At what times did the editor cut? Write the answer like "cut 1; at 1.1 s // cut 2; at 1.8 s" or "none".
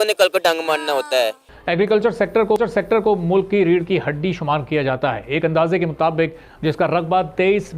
cut 1; at 1.5 s